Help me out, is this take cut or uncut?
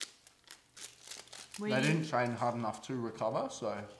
uncut